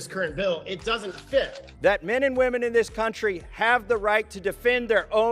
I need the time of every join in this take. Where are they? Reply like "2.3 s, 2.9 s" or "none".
1.6 s